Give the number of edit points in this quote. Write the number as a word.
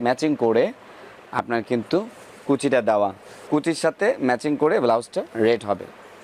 zero